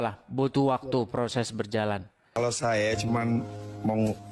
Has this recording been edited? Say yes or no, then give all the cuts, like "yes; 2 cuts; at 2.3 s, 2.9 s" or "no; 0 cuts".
yes; 1 cut; at 2.4 s